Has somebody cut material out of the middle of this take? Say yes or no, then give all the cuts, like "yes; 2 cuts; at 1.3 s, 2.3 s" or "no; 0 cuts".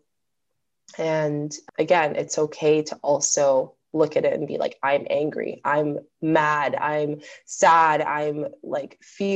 no; 0 cuts